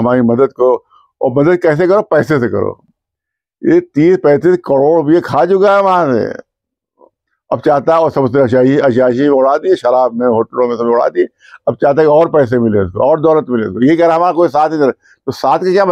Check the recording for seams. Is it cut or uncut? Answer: uncut